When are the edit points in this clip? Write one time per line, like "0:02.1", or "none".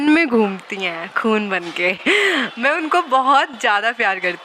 none